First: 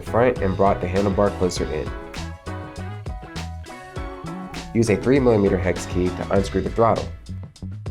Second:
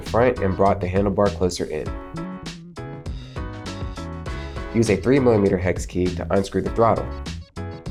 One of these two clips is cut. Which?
first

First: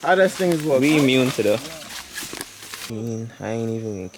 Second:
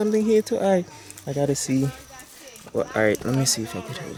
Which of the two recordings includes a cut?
first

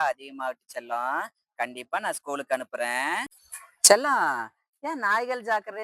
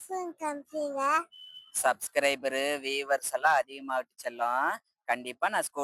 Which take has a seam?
first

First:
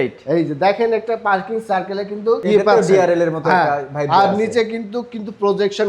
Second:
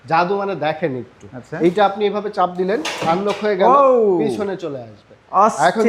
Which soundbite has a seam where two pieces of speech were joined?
first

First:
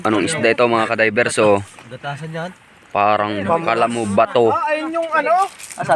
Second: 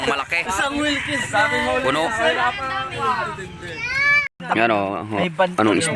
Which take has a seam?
second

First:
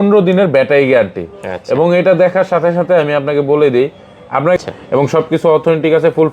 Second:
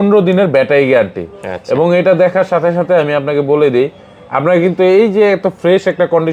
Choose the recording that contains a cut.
first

